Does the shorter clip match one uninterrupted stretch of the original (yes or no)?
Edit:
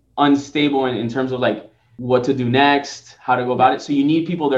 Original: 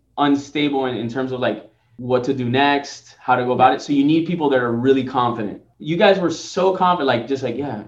yes